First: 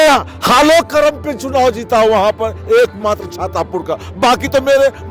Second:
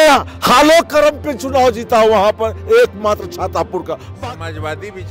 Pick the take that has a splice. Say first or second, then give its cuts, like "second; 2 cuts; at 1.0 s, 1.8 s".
second; 1 cut; at 4.1 s